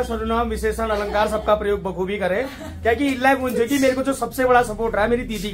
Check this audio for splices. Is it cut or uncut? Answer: uncut